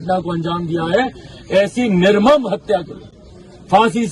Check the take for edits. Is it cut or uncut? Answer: uncut